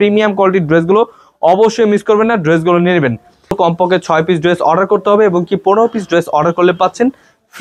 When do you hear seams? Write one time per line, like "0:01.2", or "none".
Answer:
0:03.6